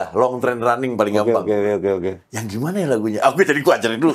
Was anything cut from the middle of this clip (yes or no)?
no